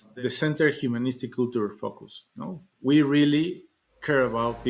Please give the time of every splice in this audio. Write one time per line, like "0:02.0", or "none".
none